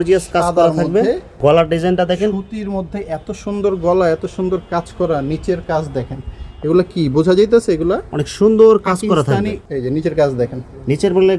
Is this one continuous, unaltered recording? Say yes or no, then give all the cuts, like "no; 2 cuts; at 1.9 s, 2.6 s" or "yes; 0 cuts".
no; 2 cuts; at 1.3 s, 9.6 s